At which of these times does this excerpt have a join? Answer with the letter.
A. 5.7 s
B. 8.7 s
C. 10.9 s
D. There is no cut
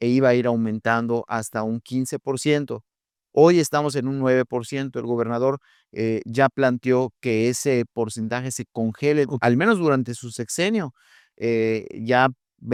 D